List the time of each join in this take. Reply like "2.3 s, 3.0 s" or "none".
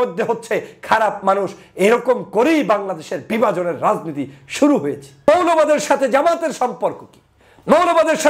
5.1 s